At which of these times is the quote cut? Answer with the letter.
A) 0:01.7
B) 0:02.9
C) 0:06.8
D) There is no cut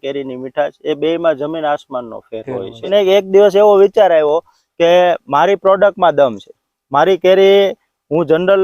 B